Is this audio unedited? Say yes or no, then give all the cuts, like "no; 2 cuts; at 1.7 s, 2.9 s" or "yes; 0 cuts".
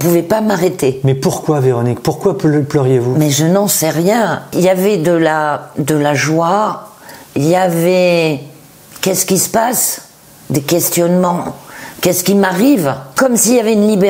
no; 2 cuts; at 4.4 s, 13.1 s